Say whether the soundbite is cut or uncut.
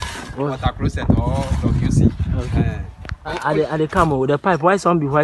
cut